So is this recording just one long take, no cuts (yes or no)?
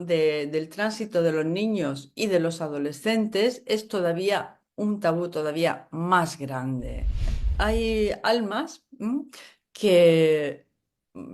no